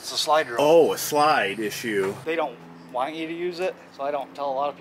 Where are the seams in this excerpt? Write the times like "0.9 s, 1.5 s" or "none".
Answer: 2.2 s, 3.9 s